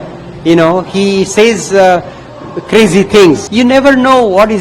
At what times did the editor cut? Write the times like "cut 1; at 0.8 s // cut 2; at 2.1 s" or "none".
cut 1; at 3.5 s